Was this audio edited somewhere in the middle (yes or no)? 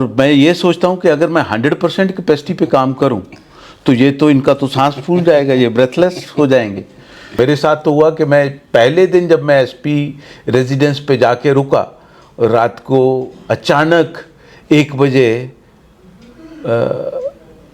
yes